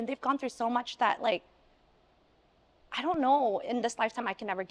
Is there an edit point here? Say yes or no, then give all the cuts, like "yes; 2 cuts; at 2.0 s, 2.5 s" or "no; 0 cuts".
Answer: no; 0 cuts